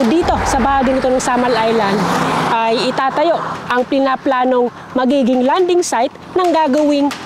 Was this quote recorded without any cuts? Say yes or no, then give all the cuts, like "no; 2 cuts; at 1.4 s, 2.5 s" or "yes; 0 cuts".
yes; 0 cuts